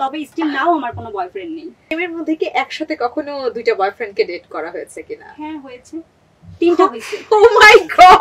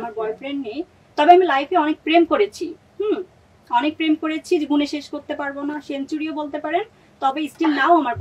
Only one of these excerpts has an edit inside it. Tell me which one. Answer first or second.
first